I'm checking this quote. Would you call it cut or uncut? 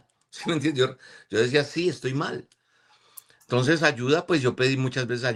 uncut